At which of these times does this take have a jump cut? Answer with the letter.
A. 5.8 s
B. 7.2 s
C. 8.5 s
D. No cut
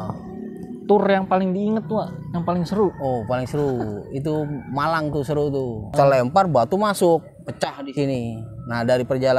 A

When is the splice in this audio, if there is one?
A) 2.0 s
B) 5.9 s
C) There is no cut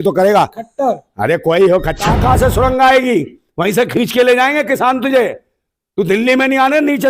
A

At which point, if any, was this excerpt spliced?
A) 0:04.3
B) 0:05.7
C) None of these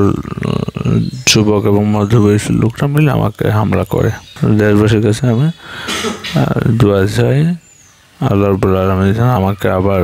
A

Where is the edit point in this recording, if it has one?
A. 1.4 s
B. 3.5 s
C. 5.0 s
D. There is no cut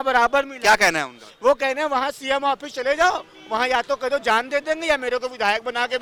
D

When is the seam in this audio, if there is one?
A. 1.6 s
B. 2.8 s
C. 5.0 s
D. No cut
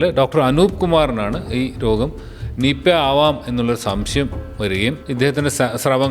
C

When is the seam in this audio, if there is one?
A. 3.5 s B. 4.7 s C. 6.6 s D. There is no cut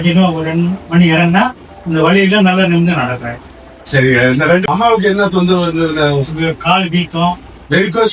B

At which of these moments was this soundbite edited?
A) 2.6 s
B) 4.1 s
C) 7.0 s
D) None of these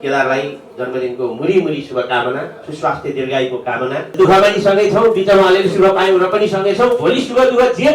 B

